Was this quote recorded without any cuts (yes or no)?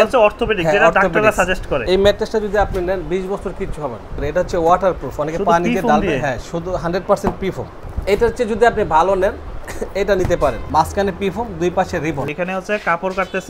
no